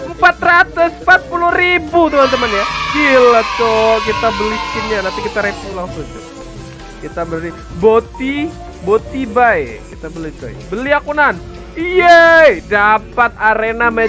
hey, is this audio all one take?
yes; 0 cuts

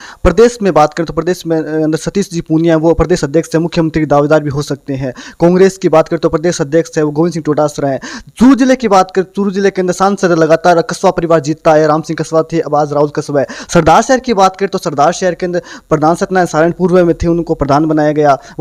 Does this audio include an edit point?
no; 0 cuts

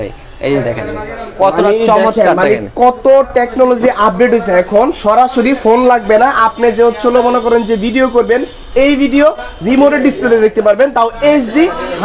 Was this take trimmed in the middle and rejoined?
no; 0 cuts

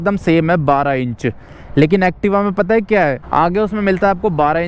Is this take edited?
yes; 1 cut; at 3.2 s

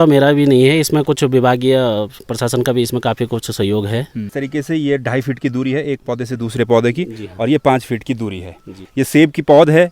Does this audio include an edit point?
yes; 2 cuts; at 4.3 s, 8.9 s

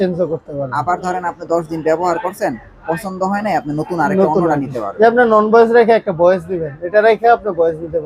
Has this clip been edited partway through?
no; 0 cuts

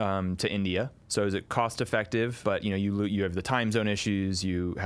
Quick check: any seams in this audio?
yes; 2 cuts; at 1.0 s, 2.4 s

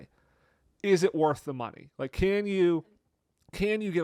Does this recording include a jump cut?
no; 0 cuts

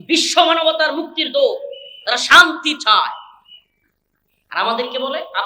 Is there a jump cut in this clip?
no; 0 cuts

